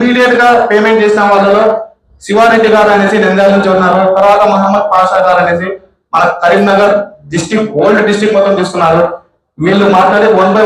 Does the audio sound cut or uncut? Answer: uncut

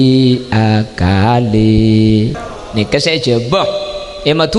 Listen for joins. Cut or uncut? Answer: cut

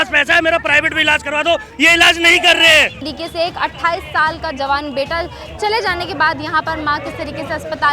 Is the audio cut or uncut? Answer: cut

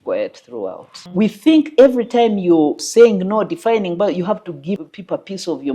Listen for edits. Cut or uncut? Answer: cut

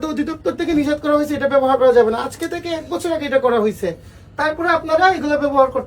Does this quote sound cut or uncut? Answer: uncut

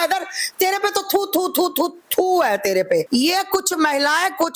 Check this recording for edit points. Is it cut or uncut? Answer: cut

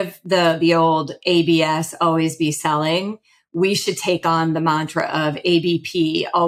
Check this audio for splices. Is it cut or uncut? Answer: uncut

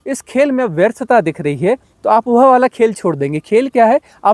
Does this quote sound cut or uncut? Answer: uncut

